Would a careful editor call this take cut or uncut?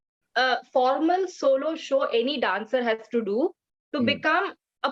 uncut